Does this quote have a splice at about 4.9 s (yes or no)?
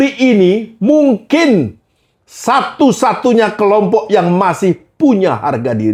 no